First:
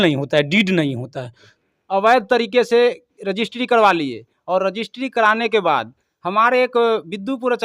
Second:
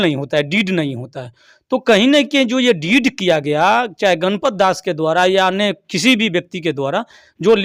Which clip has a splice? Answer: first; 1 cut; at 1.5 s

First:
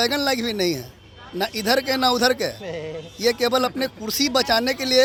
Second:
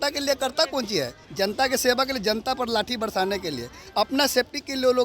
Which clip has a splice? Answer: second; 1 cut; at 1.2 s

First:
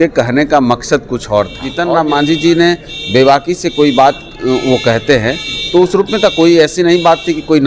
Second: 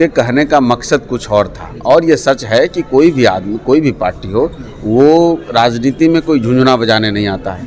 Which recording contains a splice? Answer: first; 1 cut; at 1.7 s

